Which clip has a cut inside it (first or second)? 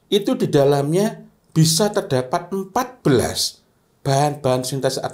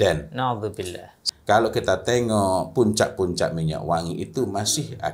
second